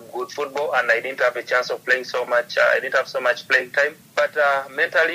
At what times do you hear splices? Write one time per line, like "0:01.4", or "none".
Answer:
0:04.0